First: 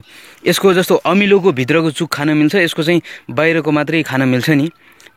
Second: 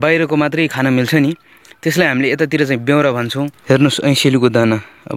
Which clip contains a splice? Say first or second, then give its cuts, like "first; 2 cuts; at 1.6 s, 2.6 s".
second; 1 cut; at 3.5 s